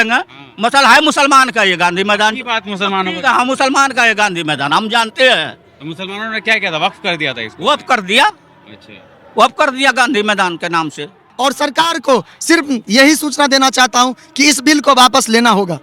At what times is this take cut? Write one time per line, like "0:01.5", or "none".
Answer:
0:11.3